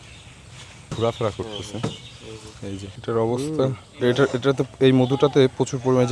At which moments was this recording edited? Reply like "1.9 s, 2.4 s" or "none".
0.9 s, 2.8 s